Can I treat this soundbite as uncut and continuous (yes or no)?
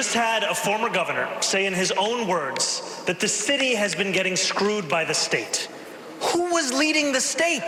yes